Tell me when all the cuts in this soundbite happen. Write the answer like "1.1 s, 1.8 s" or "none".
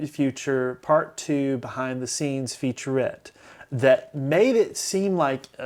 none